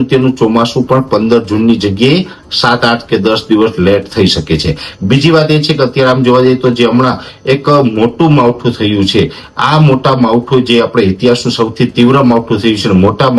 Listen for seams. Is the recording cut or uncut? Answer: uncut